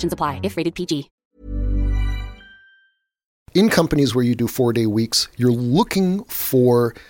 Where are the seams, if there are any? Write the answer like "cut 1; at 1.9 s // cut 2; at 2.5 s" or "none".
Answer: cut 1; at 1.1 s // cut 2; at 3.4 s

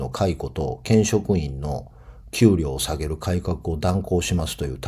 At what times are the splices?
none

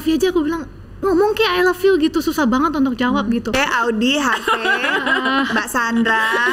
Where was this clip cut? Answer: cut 1; at 3.5 s

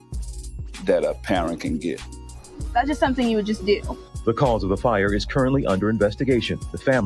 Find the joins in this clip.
cut 1; at 2.0 s

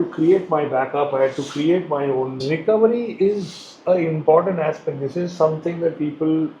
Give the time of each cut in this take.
cut 1; at 2.4 s

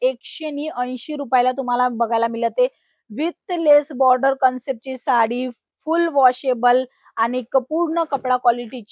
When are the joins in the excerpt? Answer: none

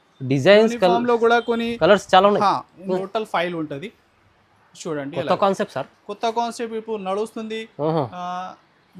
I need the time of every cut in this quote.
cut 1; at 3.0 s

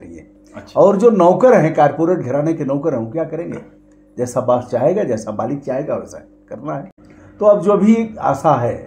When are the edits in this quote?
cut 1; at 7.0 s

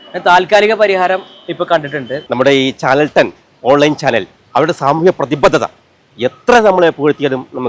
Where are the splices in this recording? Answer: cut 1; at 2.2 s

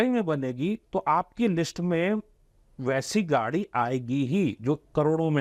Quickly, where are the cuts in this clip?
none

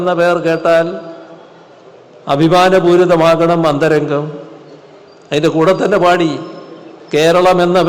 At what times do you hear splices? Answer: none

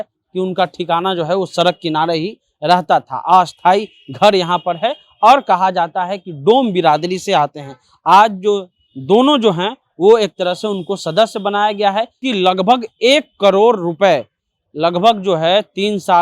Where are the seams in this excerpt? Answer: cut 1; at 12.2 s

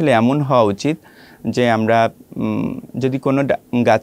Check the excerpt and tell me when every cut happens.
none

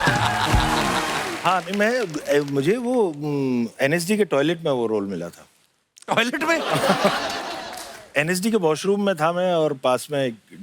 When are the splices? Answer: cut 1; at 1.3 s

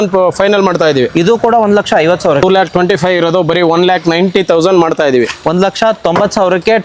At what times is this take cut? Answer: cut 1; at 2.4 s

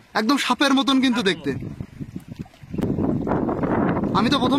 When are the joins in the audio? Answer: cut 1; at 2.8 s

